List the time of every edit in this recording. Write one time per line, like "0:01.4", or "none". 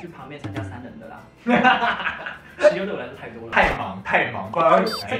0:03.4